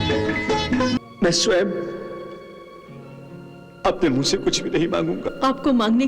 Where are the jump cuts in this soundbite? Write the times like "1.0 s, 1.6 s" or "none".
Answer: 1.0 s